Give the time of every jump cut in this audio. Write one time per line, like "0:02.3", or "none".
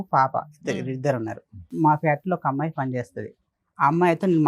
0:01.7